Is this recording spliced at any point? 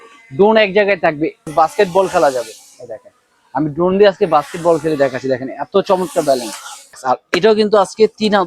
yes; 2 cuts; at 1.5 s, 7.0 s

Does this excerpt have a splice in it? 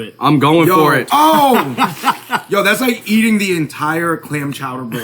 yes; 1 cut; at 1.0 s

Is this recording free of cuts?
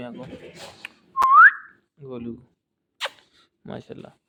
yes; 0 cuts

